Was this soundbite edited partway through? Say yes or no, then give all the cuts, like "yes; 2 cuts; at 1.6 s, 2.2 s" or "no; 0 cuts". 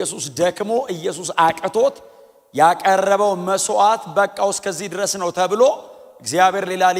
no; 0 cuts